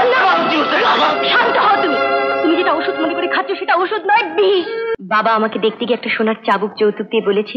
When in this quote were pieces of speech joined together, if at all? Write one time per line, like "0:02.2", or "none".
0:05.0